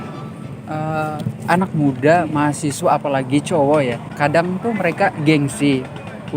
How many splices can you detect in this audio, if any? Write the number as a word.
one